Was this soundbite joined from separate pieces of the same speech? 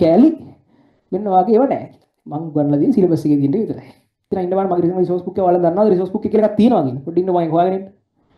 yes; 1 cut; at 4.3 s

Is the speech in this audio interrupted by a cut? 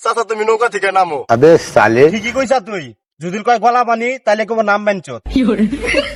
no; 0 cuts

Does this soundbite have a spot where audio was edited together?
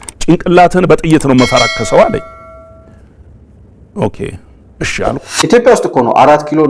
yes; 1 cut; at 5.3 s

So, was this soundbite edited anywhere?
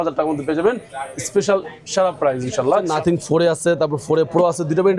yes; 1 cut; at 2.8 s

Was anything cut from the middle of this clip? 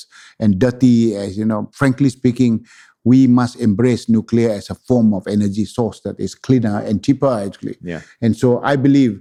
no; 0 cuts

